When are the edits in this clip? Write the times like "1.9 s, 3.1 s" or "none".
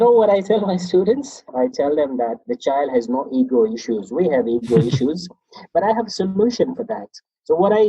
1.4 s, 2.5 s